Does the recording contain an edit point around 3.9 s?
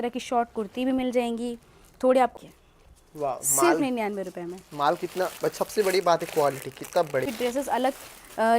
no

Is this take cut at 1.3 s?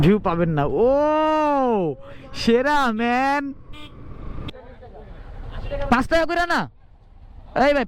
no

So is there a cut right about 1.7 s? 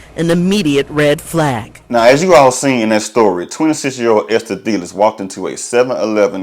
no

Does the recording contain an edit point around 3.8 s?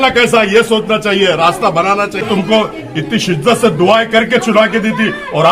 no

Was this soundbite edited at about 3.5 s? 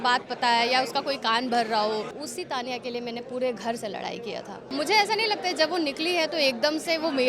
no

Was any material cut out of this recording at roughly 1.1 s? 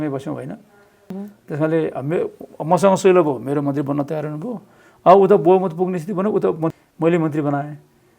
yes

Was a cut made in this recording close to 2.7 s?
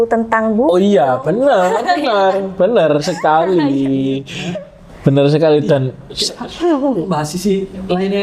no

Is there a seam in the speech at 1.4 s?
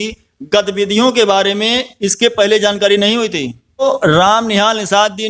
no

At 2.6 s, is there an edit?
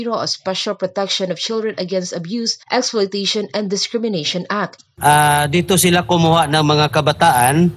no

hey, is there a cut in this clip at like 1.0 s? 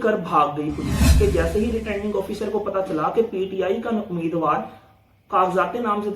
yes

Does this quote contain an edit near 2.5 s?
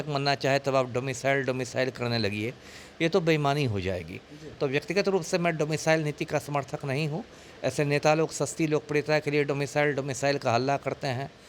no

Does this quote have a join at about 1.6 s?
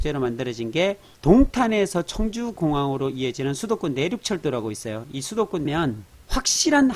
no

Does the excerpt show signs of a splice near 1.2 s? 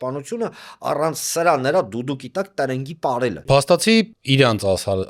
no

